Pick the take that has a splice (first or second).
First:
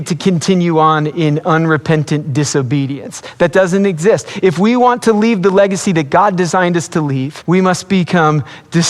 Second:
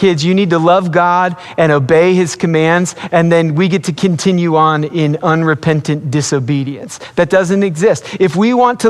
first